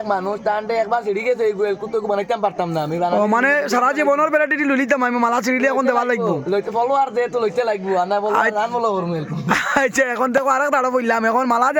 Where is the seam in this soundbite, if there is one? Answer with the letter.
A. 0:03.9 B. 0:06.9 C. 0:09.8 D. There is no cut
D